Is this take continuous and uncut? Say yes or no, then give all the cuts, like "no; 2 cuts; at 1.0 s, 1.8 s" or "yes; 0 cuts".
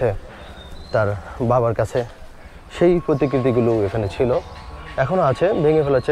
yes; 0 cuts